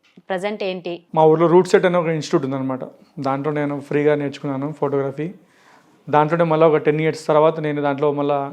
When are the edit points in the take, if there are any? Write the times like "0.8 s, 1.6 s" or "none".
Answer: 1.0 s